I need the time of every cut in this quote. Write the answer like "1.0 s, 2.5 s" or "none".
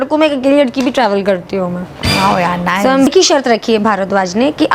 3.1 s